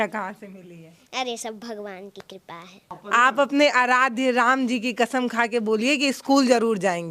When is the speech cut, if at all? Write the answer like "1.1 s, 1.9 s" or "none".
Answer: 2.9 s